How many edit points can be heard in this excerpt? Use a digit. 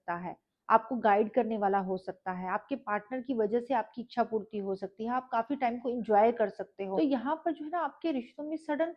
1